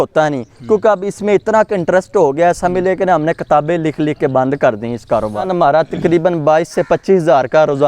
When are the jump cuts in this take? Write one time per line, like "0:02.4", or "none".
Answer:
0:05.4

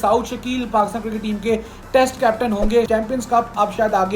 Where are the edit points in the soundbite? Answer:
0:02.9

